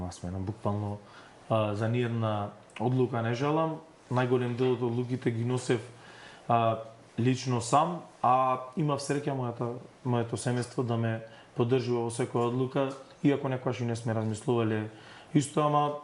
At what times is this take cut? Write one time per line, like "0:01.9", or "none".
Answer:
none